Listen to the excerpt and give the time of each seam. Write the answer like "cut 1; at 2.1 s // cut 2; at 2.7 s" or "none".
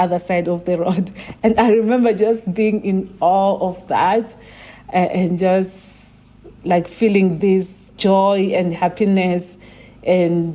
none